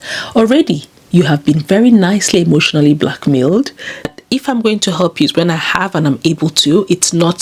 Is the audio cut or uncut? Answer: cut